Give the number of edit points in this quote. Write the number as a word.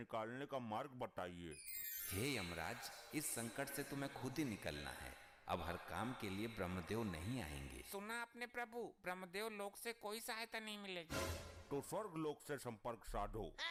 zero